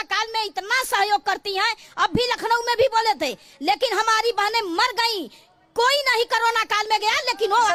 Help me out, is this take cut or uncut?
uncut